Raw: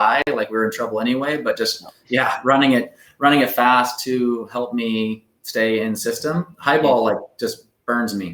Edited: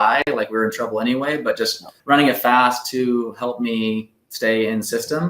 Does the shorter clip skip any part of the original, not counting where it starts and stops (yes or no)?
yes